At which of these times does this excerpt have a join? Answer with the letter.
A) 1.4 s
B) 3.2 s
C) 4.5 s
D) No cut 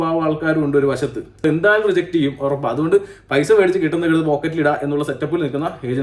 A